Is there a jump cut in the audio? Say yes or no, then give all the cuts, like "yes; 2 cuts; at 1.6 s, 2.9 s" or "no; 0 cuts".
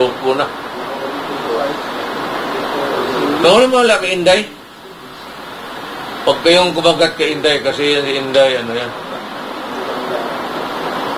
no; 0 cuts